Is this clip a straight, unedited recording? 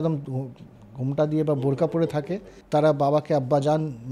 no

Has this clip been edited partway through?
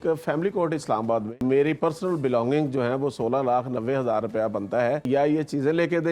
yes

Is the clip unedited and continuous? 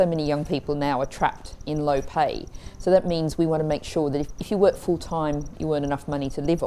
yes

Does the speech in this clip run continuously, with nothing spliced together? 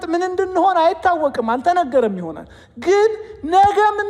yes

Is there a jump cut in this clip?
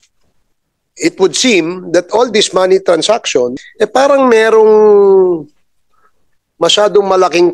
yes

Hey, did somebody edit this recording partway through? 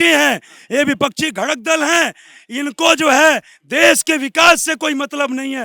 no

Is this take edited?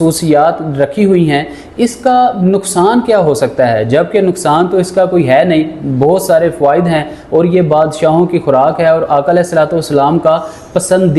no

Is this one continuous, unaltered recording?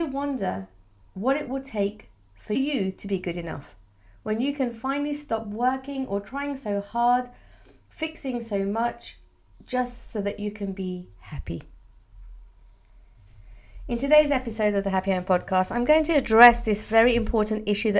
yes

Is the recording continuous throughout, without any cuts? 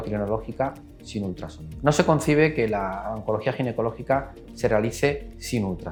yes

